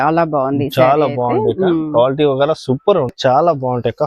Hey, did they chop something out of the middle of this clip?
yes; 1 cut; at 3.2 s

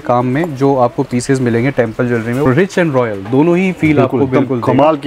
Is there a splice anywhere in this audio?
yes; 1 cut; at 2.5 s

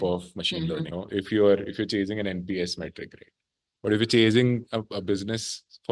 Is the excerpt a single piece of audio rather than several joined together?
no; 1 cut; at 1.0 s

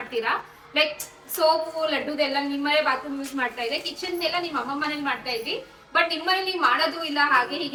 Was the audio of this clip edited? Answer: no; 0 cuts

